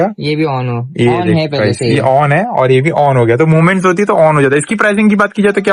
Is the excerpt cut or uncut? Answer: uncut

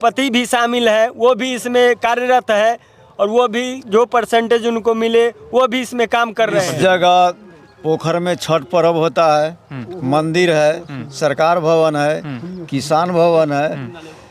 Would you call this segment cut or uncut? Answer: cut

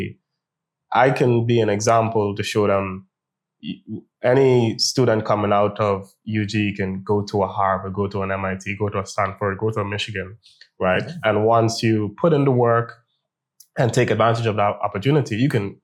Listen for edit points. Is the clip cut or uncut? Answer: uncut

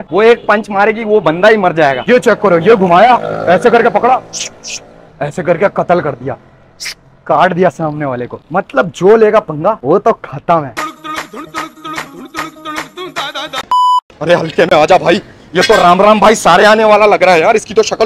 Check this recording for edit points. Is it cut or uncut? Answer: cut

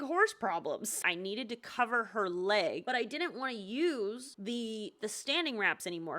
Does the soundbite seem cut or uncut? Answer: cut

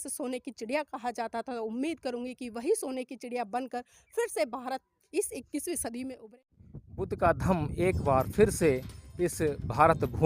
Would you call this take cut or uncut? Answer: cut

